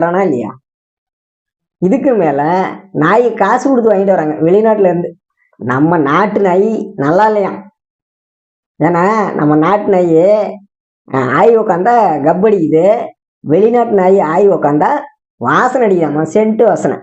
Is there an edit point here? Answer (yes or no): no